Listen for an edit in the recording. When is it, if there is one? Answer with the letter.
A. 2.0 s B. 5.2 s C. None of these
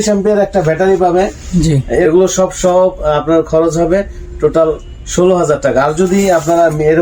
A